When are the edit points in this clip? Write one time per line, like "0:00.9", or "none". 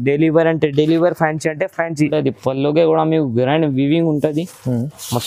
0:02.1